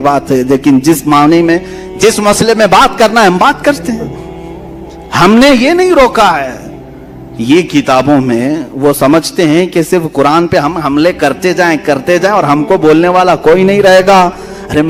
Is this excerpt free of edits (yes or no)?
yes